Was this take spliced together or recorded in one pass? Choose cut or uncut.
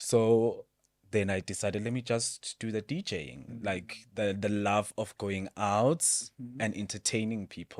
uncut